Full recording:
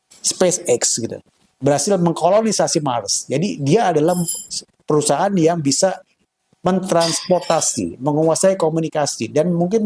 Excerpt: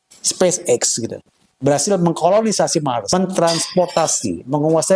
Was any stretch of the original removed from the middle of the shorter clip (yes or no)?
yes